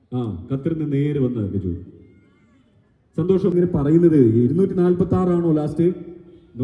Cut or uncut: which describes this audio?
cut